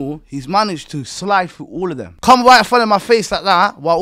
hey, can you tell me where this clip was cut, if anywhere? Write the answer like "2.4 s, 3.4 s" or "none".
2.1 s